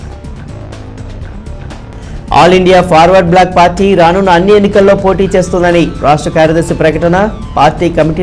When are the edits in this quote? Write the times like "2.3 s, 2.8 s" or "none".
1.1 s, 2.1 s